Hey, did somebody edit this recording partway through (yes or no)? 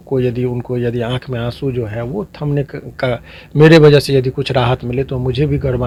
no